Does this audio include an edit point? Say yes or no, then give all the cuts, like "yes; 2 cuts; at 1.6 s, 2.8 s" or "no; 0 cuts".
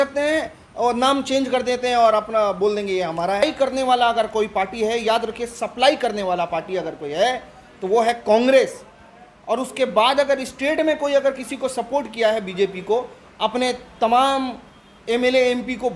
yes; 1 cut; at 3.4 s